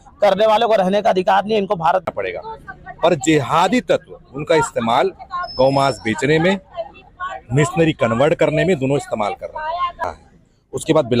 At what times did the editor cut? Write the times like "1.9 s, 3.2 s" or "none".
2.1 s, 10.0 s